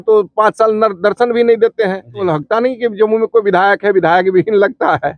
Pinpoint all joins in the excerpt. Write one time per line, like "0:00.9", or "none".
0:02.2